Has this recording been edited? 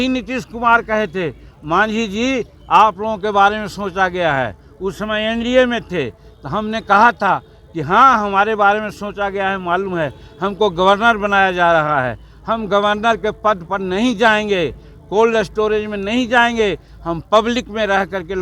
no; 0 cuts

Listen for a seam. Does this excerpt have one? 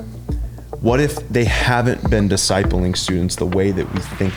no; 0 cuts

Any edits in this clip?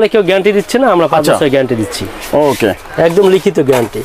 no; 0 cuts

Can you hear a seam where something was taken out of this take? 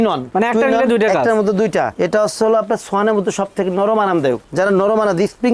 yes; 1 cut; at 1.9 s

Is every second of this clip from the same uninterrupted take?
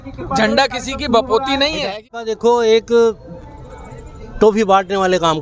no; 1 cut; at 2.2 s

